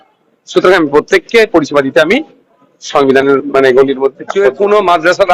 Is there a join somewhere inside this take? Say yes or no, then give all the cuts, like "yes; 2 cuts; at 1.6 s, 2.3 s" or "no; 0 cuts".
yes; 1 cut; at 4.2 s